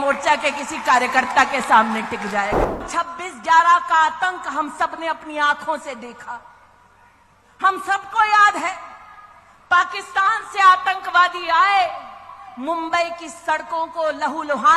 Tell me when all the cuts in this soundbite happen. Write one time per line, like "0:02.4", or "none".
0:02.9